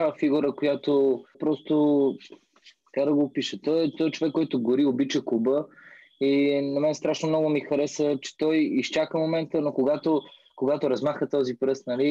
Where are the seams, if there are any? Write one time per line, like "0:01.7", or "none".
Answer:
none

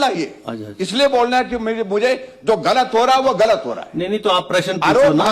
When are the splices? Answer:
none

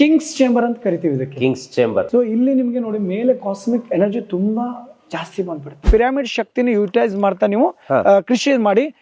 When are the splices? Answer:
0:02.1
0:05.9

